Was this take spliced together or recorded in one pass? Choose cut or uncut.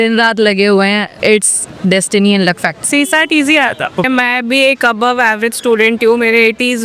cut